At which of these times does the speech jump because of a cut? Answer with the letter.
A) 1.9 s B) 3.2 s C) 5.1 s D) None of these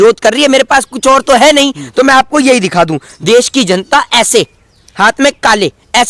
D